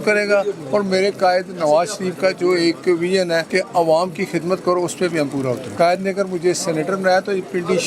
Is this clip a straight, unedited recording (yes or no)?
no